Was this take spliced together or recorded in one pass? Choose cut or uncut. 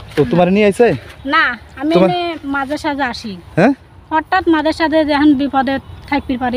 uncut